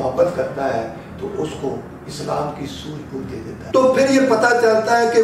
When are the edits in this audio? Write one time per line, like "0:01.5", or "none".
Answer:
0:03.5